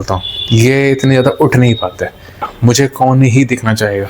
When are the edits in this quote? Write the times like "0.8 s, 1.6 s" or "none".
2.5 s

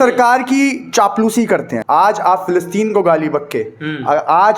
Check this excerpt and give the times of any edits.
1.7 s

